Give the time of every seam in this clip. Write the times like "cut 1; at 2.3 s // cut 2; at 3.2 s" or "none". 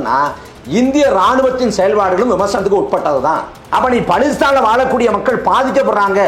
cut 1; at 3.6 s